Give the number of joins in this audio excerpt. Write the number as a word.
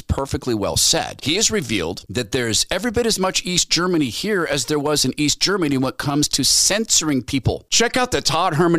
one